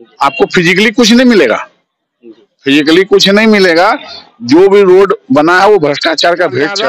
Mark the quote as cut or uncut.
uncut